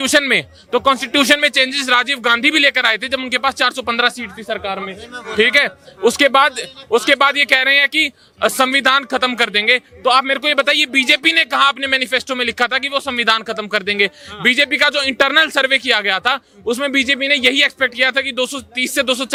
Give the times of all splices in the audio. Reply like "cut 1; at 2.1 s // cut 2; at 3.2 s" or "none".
none